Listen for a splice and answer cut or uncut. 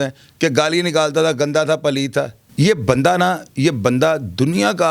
cut